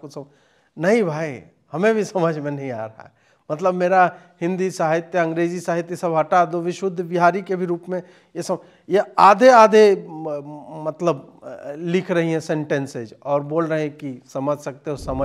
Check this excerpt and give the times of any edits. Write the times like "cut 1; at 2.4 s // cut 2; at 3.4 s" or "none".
none